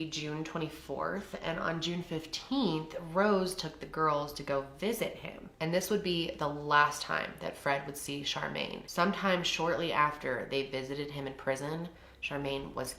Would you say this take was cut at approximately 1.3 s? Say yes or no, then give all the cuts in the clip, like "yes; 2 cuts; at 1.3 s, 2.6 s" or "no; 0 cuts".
no; 0 cuts